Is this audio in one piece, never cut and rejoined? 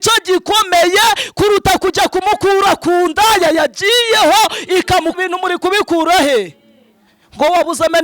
no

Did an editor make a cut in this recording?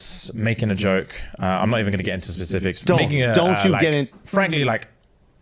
no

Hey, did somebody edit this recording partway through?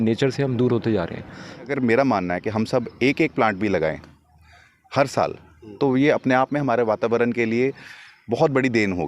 yes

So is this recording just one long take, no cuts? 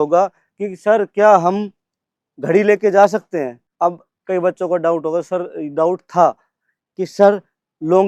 no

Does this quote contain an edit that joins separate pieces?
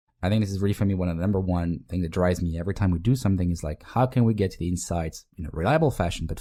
no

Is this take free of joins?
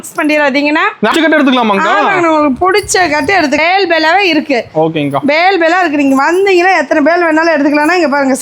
no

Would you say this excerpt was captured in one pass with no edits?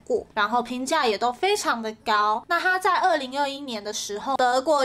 yes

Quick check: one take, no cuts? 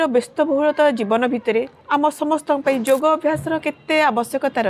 no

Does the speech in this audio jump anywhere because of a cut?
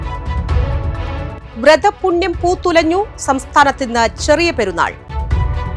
no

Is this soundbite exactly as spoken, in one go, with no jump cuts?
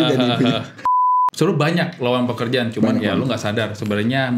no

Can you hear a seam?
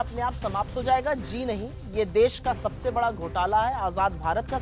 no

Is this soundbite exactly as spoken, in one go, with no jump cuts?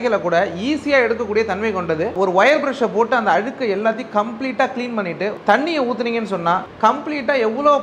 no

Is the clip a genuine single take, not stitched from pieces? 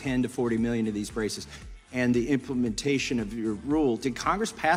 yes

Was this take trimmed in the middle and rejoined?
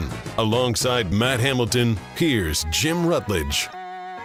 no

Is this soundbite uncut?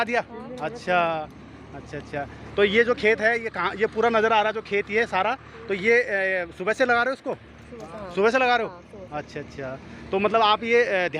yes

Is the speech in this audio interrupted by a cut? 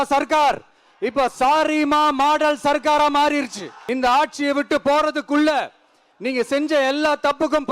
yes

